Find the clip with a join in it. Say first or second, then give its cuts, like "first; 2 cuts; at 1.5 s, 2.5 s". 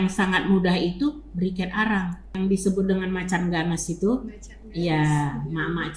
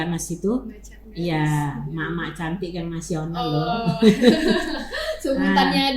first; 1 cut; at 2.2 s